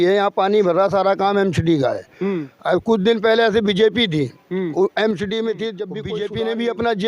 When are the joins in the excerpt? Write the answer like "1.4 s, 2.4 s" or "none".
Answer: 6.1 s